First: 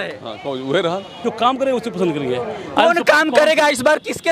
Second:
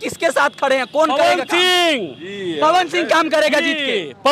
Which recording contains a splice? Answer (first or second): first